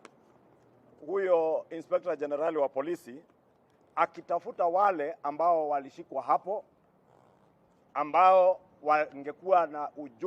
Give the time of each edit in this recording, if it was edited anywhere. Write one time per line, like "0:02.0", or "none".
0:06.7